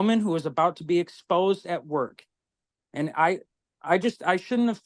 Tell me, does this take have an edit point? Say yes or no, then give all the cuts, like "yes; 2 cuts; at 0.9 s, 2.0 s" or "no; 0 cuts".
no; 0 cuts